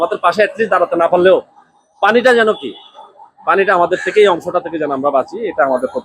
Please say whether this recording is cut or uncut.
uncut